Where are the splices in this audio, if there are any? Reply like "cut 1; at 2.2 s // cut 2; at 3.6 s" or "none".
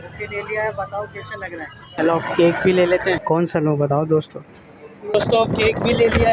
cut 1; at 1.8 s // cut 2; at 3.2 s // cut 3; at 5.1 s

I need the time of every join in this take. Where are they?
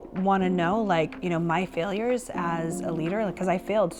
none

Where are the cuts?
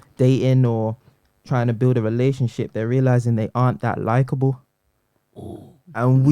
none

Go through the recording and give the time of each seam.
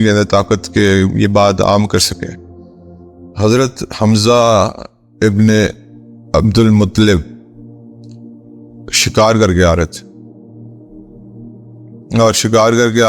cut 1; at 7.2 s // cut 2; at 8.7 s

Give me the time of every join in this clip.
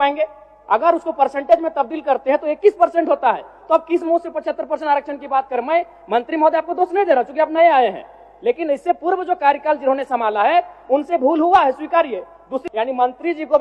cut 1; at 12.5 s

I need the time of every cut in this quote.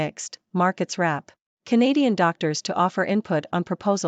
cut 1; at 1.6 s

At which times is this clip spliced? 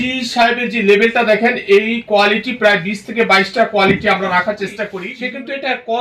cut 1; at 5.0 s

